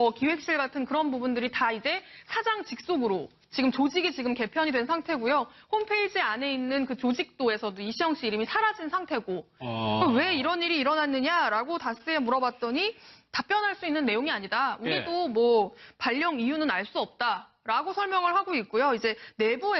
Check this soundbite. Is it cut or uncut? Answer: uncut